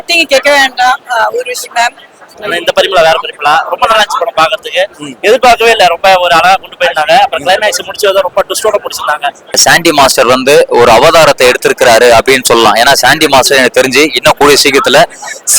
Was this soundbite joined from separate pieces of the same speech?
yes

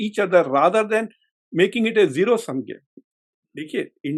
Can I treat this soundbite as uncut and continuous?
yes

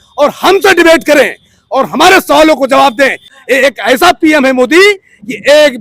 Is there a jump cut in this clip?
yes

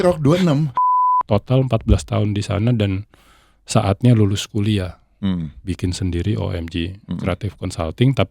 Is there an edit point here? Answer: yes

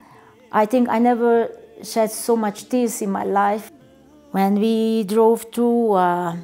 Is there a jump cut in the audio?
yes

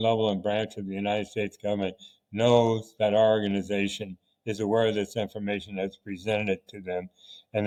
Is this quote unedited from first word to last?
yes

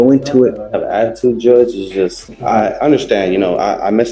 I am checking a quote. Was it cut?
yes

